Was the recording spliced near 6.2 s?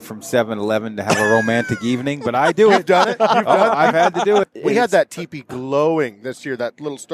no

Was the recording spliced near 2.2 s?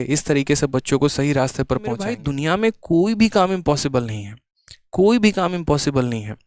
yes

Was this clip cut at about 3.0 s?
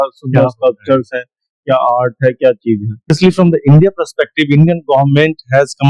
yes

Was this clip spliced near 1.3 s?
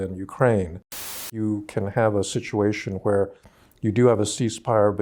yes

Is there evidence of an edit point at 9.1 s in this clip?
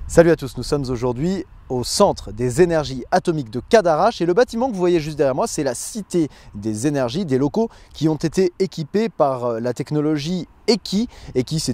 no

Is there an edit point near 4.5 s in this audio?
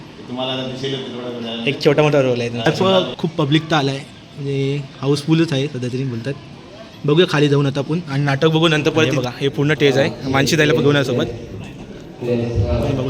no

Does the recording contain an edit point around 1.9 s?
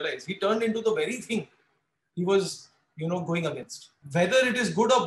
no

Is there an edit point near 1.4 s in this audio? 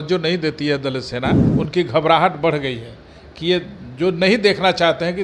yes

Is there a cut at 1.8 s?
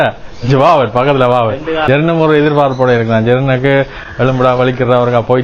yes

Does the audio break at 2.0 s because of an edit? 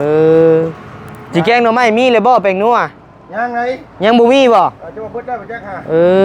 no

